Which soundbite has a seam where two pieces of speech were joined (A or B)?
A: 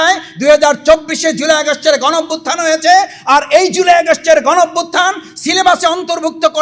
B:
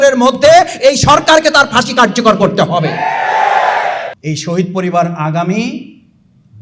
B